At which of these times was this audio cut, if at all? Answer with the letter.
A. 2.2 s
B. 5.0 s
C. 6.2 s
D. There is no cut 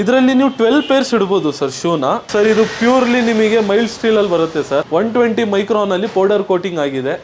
A